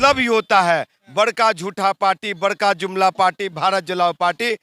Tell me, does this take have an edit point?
no; 0 cuts

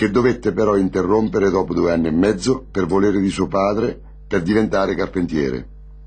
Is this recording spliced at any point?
no; 0 cuts

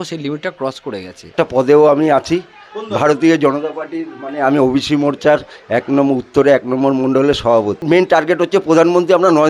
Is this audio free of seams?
no; 2 cuts; at 1.3 s, 7.8 s

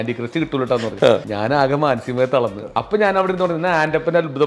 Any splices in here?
yes; 2 cuts; at 1.3 s, 2.6 s

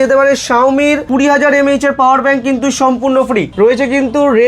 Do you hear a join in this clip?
yes; 1 cut; at 3.5 s

